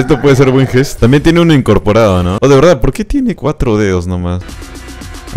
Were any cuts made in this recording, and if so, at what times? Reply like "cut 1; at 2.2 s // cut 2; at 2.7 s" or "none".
cut 1; at 0.9 s // cut 2; at 2.4 s // cut 3; at 4.4 s